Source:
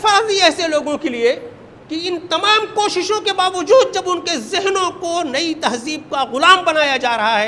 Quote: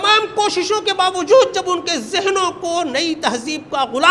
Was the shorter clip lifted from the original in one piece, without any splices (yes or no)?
yes